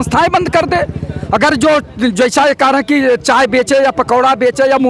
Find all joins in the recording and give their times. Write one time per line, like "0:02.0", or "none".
none